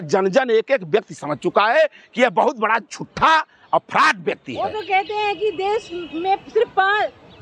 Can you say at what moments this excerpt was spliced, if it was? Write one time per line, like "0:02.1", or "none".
none